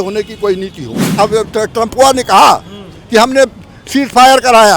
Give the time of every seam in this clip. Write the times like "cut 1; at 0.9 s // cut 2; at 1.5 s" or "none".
cut 1; at 1.1 s